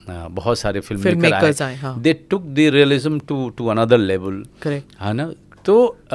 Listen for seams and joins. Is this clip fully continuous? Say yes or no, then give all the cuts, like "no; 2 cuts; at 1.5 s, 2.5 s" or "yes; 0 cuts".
yes; 0 cuts